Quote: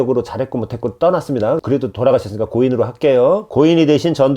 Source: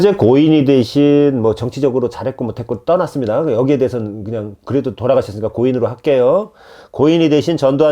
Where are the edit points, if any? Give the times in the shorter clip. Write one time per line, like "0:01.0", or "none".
0:01.6
0:03.5